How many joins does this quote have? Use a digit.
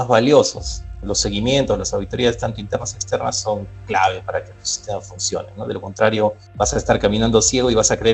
2